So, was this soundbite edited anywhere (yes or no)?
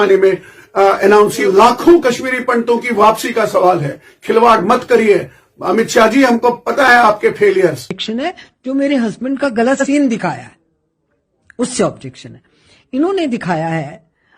yes